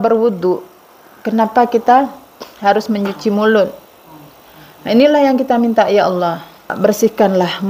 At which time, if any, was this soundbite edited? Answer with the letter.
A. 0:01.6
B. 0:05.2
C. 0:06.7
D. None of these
C